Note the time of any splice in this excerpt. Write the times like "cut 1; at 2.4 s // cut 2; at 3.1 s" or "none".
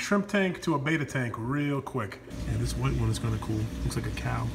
cut 1; at 2.3 s